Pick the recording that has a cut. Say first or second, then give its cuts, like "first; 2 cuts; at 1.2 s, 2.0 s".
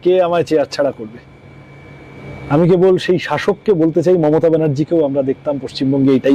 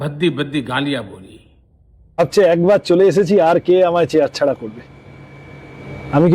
second; 1 cut; at 2.2 s